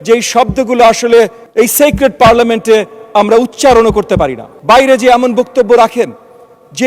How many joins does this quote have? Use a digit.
2